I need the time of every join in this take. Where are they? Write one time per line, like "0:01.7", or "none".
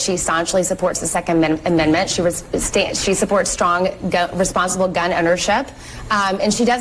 0:01.9